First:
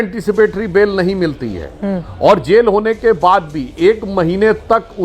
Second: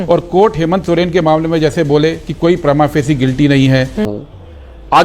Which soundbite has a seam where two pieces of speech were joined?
second; 1 cut; at 4.1 s

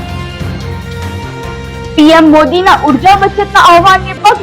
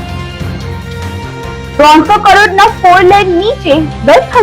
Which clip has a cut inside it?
first; 1 cut; at 1.7 s

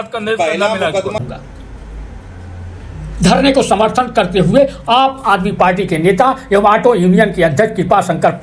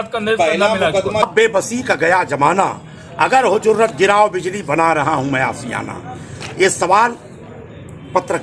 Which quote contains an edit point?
second; 1 cut; at 1.2 s

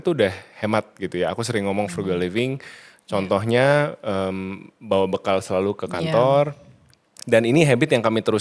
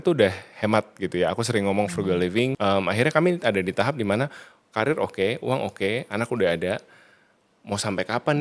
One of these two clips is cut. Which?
second; 1 cut; at 2.6 s

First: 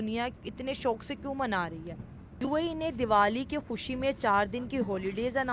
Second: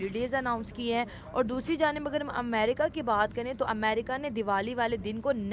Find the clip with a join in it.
first; 1 cut; at 2.4 s

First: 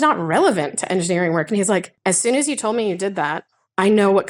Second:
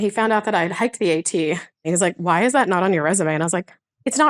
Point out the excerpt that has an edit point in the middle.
second; 1 cut; at 1.8 s

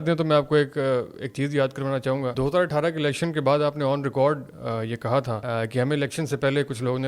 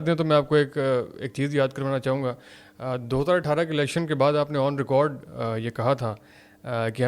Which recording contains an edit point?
first; 2 cuts; at 2.3 s, 5.4 s

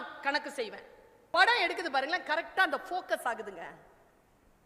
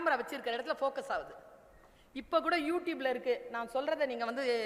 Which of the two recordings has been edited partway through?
first; 1 cut; at 1.3 s

